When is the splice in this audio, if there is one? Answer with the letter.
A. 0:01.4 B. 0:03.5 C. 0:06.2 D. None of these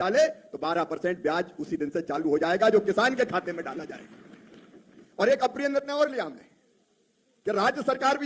D